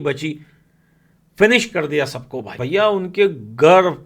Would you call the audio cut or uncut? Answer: cut